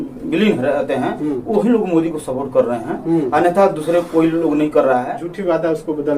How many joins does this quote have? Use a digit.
1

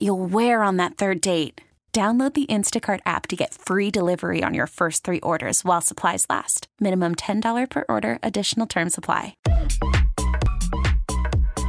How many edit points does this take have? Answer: 2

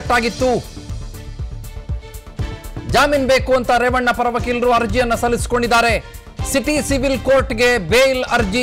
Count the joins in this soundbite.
0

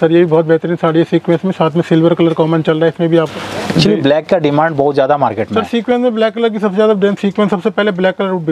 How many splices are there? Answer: 1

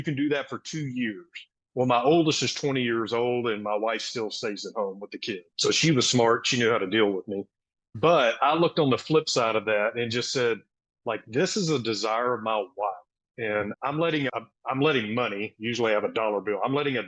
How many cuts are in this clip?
2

